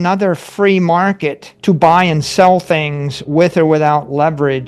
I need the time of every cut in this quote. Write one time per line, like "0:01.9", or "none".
0:01.5